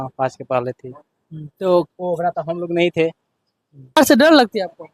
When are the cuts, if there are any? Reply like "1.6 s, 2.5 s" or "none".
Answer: 4.0 s